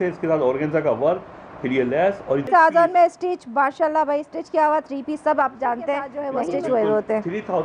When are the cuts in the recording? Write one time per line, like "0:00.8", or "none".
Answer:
0:02.5
0:06.2